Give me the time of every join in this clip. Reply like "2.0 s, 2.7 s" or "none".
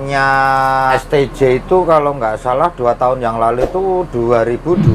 0.9 s